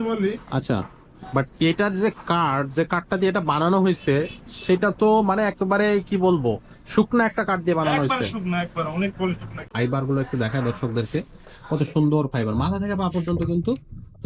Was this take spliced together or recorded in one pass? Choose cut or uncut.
cut